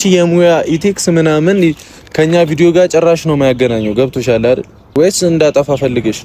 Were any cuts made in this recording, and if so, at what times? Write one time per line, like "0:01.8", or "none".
0:04.9